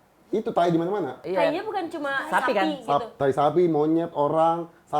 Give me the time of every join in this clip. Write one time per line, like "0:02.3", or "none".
0:01.2